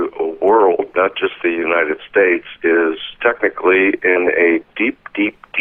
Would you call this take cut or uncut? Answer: uncut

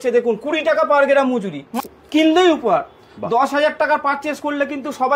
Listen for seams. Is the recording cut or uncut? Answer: cut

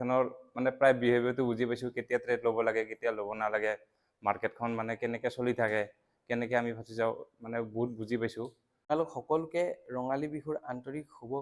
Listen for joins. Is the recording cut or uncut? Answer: cut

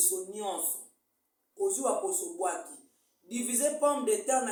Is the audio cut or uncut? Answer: uncut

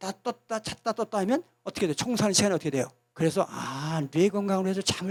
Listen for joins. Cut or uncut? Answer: uncut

